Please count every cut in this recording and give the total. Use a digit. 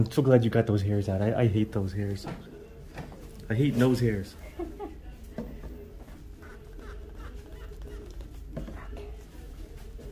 0